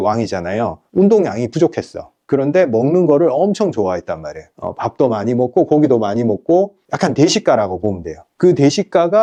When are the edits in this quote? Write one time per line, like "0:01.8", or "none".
none